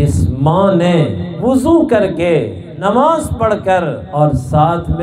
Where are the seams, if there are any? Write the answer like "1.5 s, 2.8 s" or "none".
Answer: 1.3 s, 2.7 s, 4.0 s

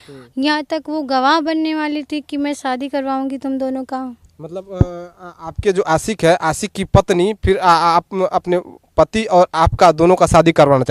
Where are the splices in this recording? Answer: none

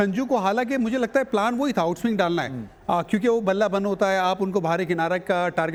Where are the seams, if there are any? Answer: none

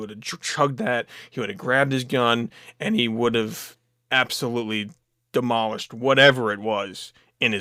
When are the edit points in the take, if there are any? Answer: none

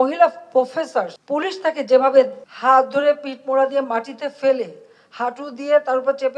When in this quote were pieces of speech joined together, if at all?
1.1 s, 2.4 s

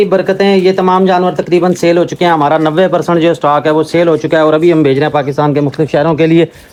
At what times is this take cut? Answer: none

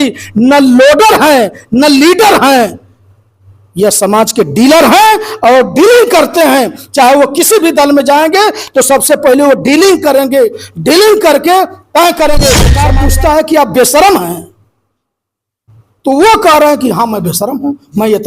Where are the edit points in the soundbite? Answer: 12.8 s

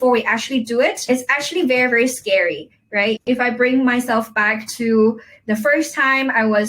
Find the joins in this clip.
1.1 s, 3.2 s

